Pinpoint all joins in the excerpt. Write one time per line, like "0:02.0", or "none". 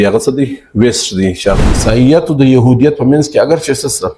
0:01.6